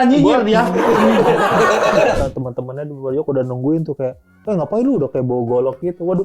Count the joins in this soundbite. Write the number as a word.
one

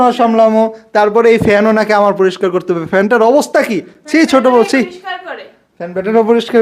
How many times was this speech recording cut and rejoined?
zero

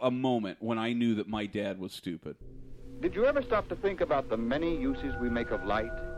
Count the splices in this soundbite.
one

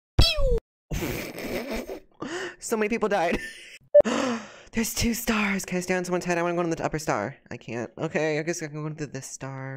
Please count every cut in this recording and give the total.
one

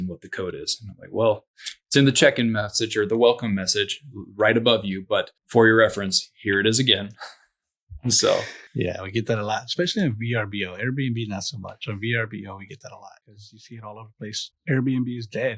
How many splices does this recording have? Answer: three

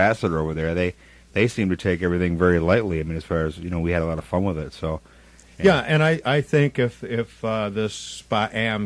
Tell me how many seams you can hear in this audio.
one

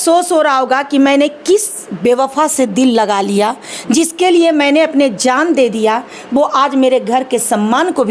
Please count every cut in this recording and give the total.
zero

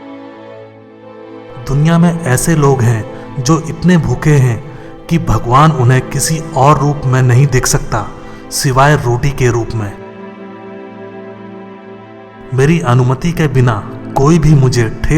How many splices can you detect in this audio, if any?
one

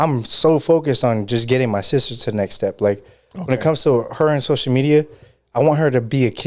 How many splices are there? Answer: zero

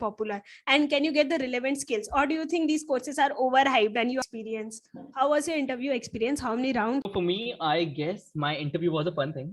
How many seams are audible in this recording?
one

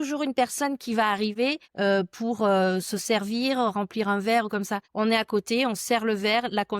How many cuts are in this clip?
two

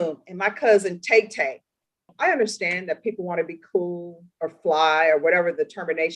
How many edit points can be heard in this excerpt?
one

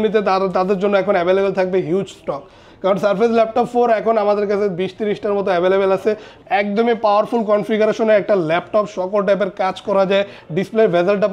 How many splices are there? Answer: one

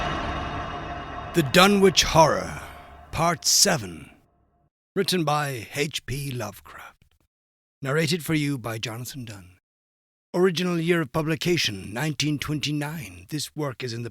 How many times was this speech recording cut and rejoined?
one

